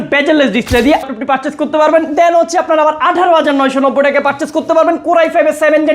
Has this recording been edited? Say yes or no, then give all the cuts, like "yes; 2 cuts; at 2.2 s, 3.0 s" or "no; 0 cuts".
yes; 1 cut; at 1.0 s